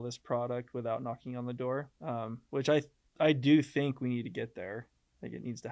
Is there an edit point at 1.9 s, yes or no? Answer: yes